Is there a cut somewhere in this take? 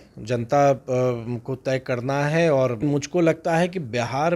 yes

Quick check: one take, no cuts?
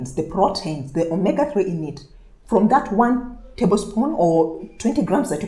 no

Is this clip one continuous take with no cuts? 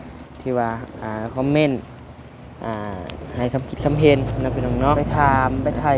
no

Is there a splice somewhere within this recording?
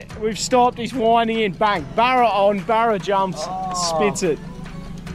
no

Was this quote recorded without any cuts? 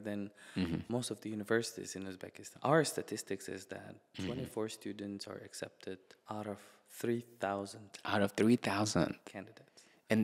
no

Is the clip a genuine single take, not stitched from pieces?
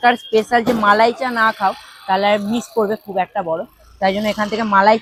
yes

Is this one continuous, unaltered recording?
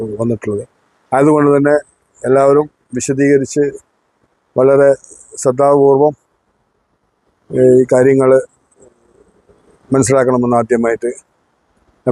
yes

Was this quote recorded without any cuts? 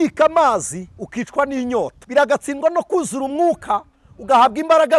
no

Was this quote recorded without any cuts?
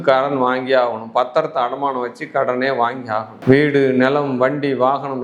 yes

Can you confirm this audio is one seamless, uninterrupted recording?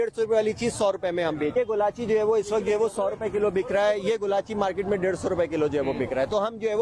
no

